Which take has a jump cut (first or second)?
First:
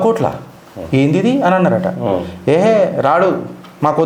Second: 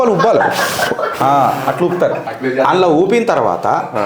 second